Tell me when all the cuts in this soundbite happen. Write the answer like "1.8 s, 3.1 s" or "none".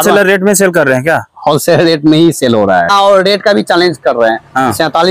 2.9 s

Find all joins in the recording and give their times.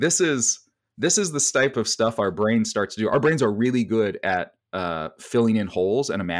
1.7 s

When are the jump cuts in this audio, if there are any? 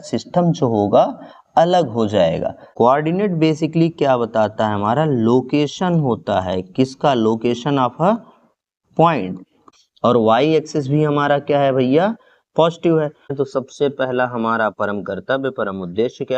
2.6 s, 9.6 s, 13.3 s

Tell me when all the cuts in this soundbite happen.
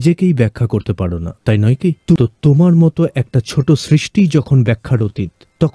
2.2 s

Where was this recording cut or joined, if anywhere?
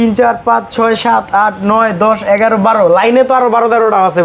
none

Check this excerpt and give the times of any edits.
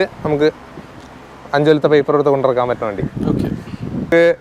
none

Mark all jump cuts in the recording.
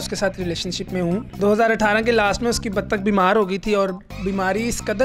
1.3 s

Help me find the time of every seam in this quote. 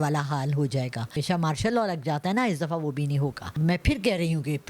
1.2 s, 3.5 s

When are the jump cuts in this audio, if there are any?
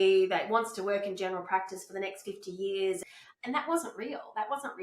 3.0 s

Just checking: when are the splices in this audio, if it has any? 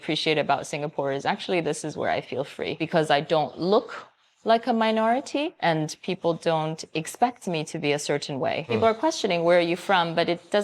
2.7 s, 5.5 s, 8.7 s

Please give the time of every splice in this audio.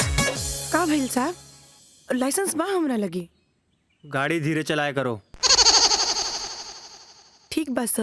none

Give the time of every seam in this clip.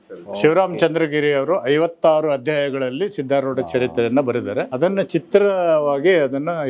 4.7 s

